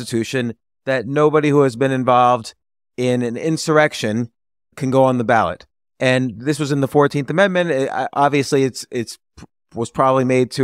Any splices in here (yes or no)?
yes